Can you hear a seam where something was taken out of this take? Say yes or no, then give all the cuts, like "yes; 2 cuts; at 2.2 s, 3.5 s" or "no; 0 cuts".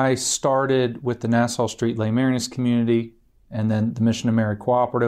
no; 0 cuts